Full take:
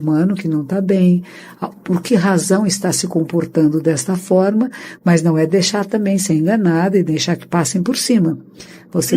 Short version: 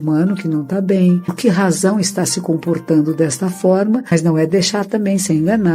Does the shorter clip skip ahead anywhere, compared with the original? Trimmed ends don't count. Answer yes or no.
yes